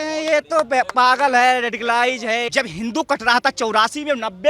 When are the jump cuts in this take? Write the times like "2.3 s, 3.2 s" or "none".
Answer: 2.4 s